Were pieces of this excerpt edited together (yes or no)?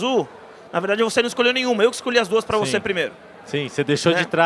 no